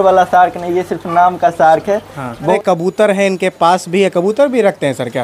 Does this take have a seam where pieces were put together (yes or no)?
yes